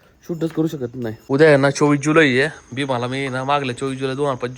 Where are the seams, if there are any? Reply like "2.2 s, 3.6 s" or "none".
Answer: 1.1 s

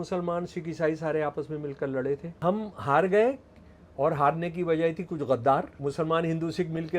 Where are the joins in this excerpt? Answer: 2.3 s, 5.7 s

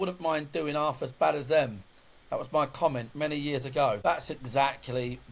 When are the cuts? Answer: 4.0 s

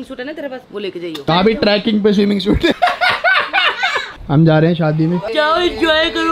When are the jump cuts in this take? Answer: 1.3 s, 2.8 s, 4.2 s

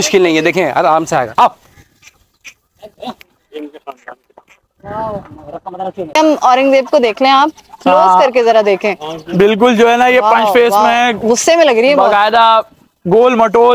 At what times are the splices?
6.1 s

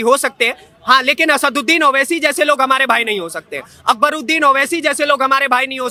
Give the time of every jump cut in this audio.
none

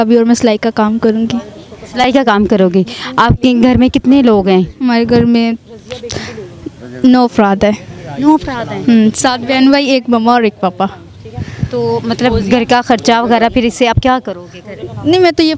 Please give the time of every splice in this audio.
none

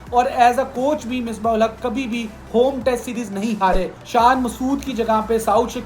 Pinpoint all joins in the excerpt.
4.0 s

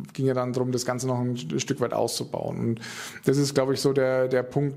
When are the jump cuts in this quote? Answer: none

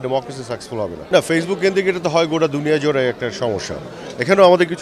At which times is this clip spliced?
1.0 s

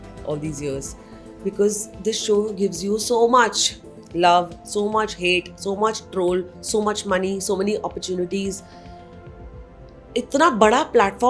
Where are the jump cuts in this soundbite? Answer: none

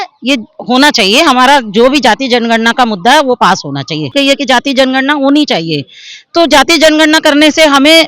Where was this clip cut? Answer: 4.1 s

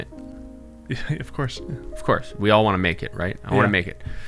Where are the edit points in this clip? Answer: none

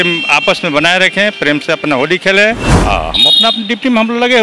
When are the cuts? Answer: 2.7 s

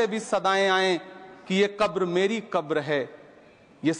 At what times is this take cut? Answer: none

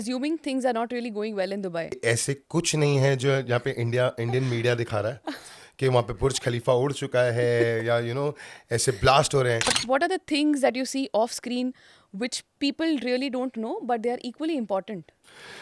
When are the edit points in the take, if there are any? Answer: 2.0 s, 9.8 s

